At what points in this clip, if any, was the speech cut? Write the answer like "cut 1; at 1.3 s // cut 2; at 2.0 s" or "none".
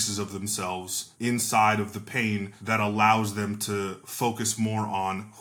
cut 1; at 1.0 s // cut 2; at 2.5 s